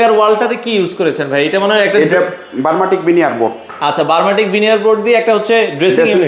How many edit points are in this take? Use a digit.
0